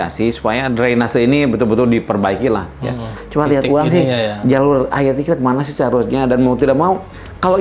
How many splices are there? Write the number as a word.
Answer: one